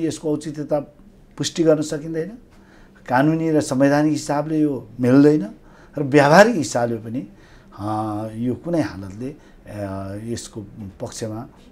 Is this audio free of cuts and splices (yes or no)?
yes